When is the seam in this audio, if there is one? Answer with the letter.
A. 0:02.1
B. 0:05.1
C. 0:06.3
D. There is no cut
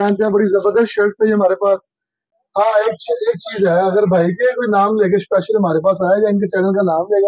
A